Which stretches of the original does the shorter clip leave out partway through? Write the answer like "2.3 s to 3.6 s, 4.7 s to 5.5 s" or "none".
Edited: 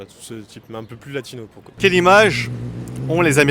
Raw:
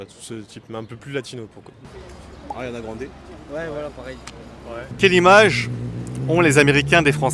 1.7 s to 4.9 s